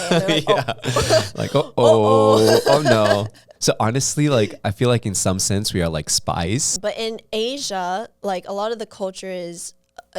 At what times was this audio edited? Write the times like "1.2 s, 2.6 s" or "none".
3.5 s, 6.7 s